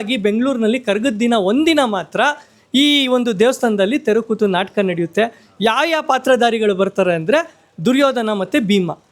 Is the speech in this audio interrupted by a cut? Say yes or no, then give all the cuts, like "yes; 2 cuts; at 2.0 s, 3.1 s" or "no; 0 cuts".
no; 0 cuts